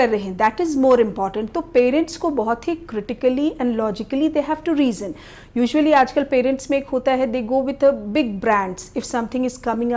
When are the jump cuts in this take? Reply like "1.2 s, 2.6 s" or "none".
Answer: none